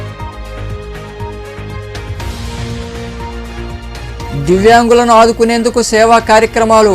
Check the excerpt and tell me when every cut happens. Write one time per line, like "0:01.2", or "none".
0:02.0